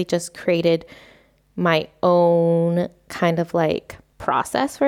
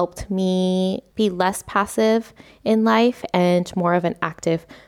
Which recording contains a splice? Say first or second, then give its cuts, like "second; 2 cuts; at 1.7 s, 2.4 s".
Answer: second; 1 cut; at 1.0 s